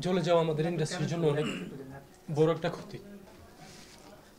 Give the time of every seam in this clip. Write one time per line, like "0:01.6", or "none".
0:03.3